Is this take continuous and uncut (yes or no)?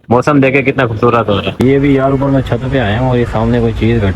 no